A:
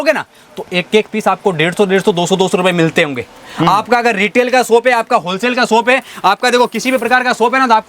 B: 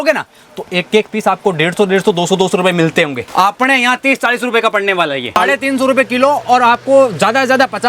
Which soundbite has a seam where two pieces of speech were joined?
B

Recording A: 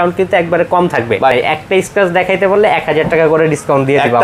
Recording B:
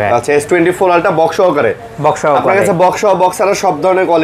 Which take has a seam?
A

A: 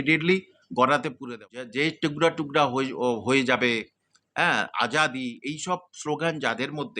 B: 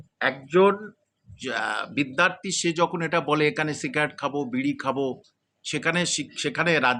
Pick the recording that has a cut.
A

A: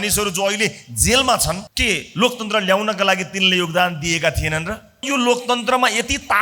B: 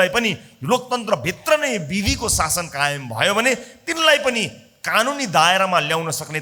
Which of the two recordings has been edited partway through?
A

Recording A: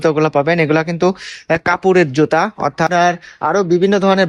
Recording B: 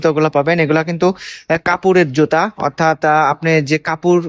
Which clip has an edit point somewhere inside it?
A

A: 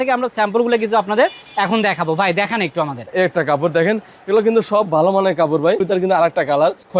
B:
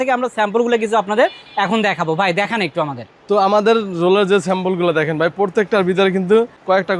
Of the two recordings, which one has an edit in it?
A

